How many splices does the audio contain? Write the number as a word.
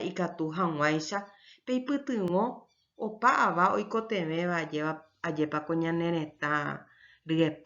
one